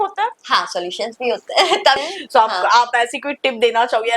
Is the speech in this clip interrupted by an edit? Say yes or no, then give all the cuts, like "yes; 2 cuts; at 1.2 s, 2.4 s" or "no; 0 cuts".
yes; 1 cut; at 2.0 s